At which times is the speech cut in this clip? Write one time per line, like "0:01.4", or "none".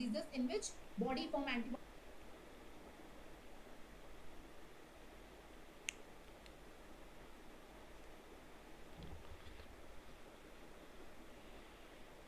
none